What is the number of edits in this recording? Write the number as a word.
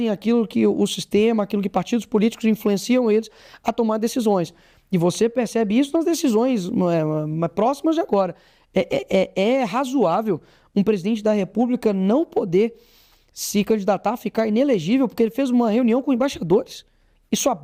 zero